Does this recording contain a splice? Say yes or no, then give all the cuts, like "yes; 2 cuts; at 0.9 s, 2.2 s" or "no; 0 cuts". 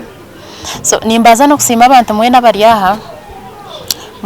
no; 0 cuts